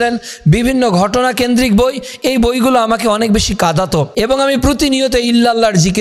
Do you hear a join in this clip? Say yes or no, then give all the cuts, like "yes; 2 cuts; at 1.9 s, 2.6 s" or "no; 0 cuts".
yes; 1 cut; at 4.1 s